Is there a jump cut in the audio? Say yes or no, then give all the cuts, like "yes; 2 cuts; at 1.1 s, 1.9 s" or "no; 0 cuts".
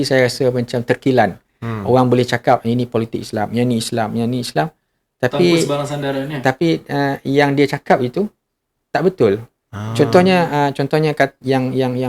no; 0 cuts